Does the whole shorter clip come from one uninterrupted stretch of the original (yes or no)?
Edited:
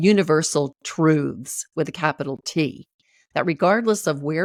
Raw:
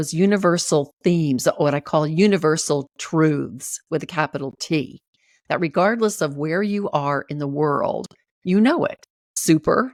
yes